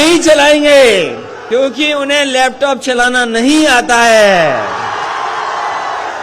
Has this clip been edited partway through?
yes; 1 cut; at 1.3 s

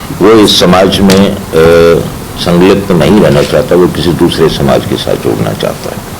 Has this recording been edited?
no; 0 cuts

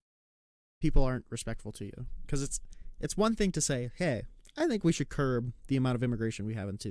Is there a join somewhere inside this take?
no; 0 cuts

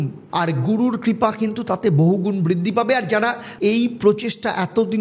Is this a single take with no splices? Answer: no; 1 cut; at 3.5 s

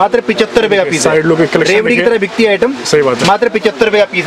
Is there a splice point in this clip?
no; 0 cuts

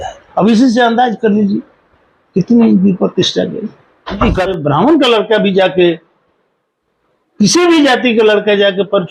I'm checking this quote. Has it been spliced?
yes; 1 cut; at 4.5 s

